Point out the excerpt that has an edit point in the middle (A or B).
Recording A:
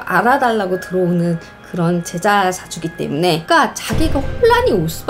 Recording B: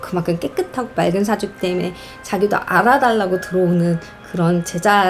A